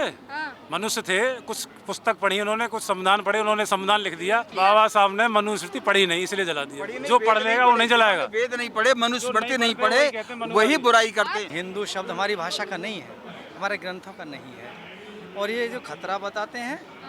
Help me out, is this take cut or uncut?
cut